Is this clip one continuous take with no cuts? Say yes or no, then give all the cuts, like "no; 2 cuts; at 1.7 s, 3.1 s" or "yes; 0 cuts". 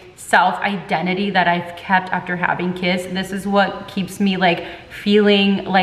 yes; 0 cuts